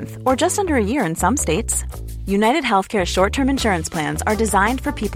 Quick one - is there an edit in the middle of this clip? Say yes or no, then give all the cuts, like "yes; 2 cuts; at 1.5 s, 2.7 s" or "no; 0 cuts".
no; 0 cuts